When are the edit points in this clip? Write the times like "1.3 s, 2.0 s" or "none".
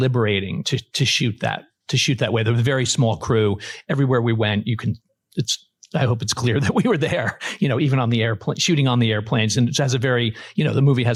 none